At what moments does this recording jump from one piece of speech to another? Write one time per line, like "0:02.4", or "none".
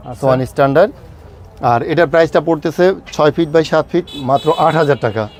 none